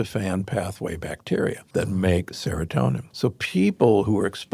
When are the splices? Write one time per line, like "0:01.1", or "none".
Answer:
0:01.6
0:03.1